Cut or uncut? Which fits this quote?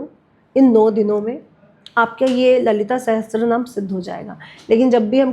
uncut